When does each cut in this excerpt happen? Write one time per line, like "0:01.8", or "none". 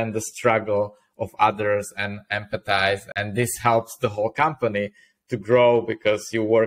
0:03.1